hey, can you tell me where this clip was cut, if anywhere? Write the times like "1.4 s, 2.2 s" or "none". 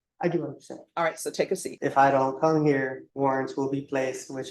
1.7 s, 3.0 s